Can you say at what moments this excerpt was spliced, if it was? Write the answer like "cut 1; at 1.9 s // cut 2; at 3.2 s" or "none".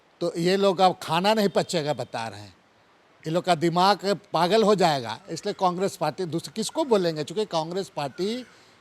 none